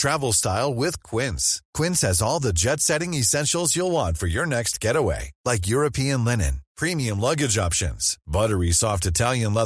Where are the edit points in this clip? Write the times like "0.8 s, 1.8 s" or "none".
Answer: none